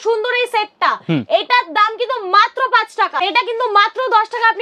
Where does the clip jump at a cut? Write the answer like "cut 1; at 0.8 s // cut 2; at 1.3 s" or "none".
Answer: cut 1; at 3.2 s